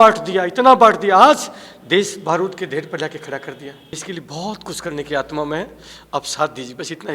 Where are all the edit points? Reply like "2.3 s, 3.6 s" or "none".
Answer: 4.0 s

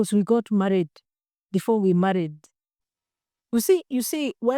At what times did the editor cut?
2.9 s

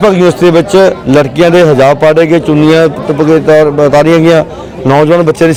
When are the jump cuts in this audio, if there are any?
none

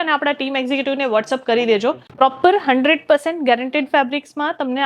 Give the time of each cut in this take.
2.1 s

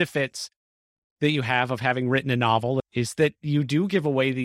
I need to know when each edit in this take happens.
2.9 s

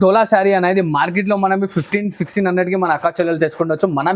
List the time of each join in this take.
none

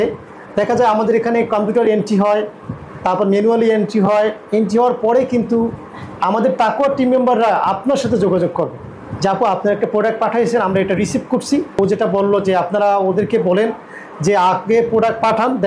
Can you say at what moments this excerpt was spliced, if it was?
11.8 s

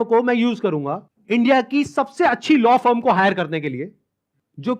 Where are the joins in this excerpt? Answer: 1.1 s

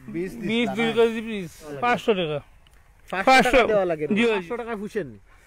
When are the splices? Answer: 1.7 s, 4.4 s

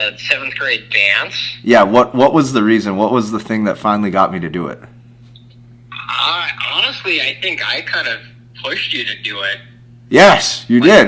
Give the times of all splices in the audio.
none

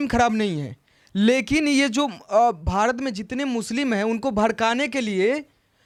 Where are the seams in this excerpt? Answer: none

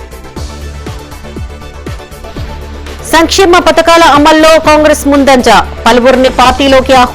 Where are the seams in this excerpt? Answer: 2.6 s

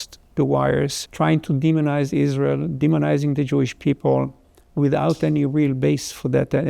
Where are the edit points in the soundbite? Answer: 1.0 s

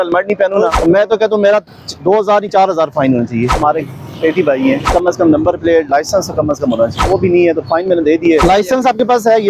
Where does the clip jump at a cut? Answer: 0.8 s, 3.5 s, 4.9 s, 7.0 s, 8.4 s

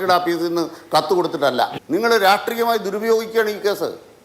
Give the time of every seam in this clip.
1.8 s

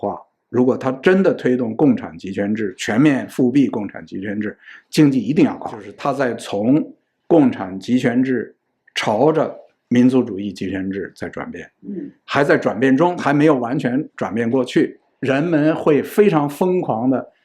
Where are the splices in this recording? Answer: 5.9 s, 15.1 s

